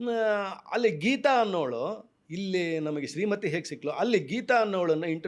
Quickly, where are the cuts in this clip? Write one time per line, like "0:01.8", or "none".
none